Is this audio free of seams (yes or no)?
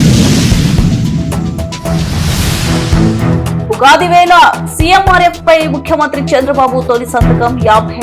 no